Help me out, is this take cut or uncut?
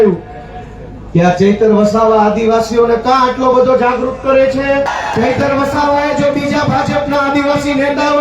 cut